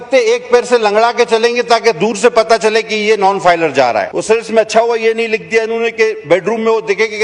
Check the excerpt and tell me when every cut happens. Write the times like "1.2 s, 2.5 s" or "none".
4.1 s